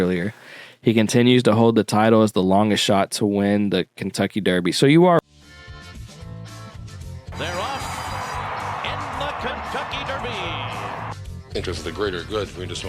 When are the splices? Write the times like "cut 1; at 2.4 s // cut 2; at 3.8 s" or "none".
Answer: cut 1; at 5.2 s